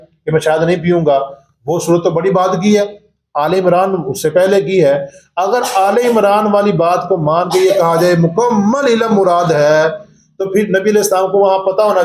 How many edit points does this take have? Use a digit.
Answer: 0